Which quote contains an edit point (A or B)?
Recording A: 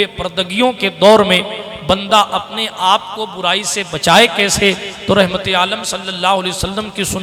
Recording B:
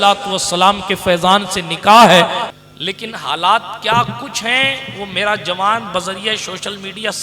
B